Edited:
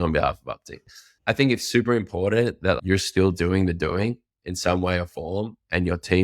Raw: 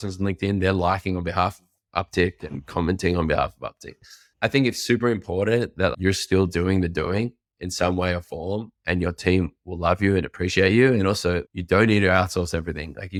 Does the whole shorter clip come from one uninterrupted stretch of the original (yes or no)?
yes